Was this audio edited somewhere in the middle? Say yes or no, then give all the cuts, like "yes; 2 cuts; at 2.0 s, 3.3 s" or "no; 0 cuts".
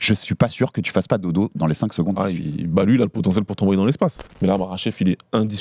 yes; 1 cut; at 4.2 s